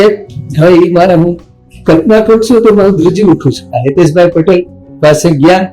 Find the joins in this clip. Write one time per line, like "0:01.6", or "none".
0:03.7